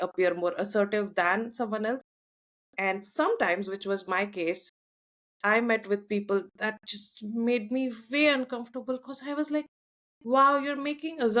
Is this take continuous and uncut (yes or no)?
yes